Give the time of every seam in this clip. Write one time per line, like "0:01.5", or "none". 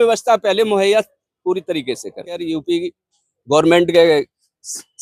0:02.4